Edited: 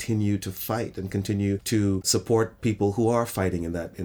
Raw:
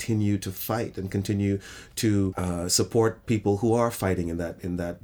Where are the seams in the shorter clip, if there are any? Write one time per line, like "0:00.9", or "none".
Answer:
0:02.0